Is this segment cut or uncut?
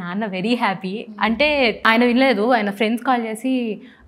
cut